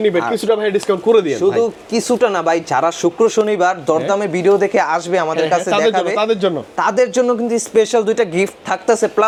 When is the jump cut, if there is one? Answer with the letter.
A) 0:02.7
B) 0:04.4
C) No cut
C